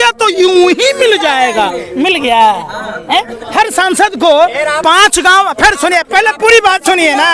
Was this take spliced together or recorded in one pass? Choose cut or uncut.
uncut